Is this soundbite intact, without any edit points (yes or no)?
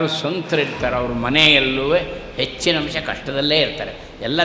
yes